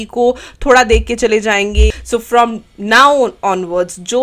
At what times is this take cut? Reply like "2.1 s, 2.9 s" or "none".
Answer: 1.9 s